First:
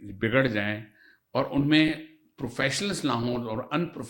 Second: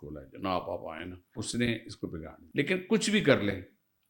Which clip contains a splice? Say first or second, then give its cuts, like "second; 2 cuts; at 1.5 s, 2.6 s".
second; 2 cuts; at 1.4 s, 2.4 s